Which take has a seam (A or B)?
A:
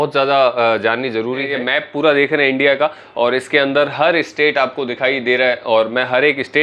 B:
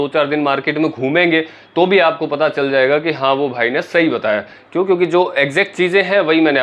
A